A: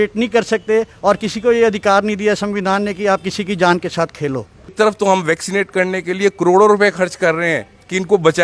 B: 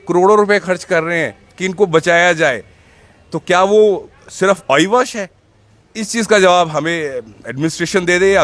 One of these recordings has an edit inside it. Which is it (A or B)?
A